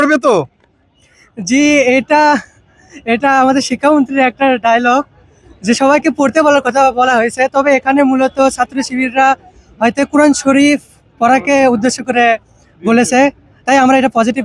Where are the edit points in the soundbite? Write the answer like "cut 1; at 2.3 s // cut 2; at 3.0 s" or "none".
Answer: none